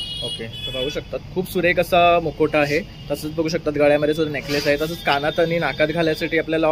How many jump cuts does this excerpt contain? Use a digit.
0